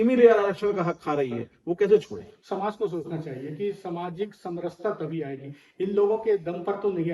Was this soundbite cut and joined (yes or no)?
no